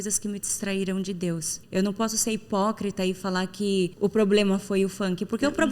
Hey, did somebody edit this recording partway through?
yes; 2 cuts; at 1.5 s, 3.9 s

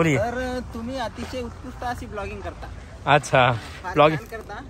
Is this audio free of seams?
yes; 0 cuts

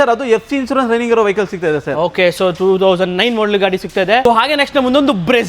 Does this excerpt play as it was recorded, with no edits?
yes; 0 cuts

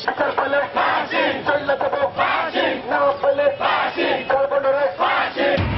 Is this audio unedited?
yes; 0 cuts

